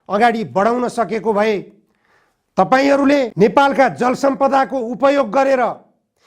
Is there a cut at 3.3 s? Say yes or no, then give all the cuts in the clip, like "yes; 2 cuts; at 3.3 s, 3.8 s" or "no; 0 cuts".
yes; 1 cut; at 3.3 s